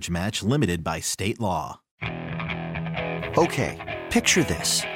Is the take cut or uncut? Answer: cut